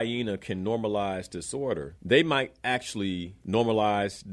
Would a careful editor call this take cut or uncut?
cut